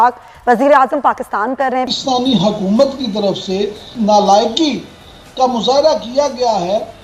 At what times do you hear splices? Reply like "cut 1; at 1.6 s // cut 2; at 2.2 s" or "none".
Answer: cut 1; at 1.9 s // cut 2; at 3.9 s